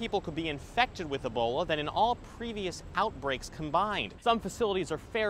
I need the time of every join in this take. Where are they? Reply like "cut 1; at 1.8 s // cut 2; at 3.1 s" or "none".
cut 1; at 4.1 s